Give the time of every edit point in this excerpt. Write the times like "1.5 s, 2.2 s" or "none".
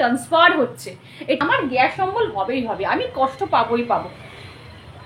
1.4 s